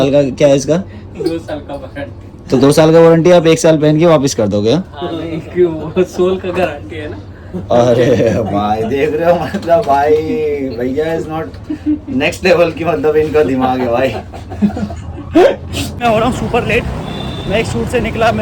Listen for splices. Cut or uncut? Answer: cut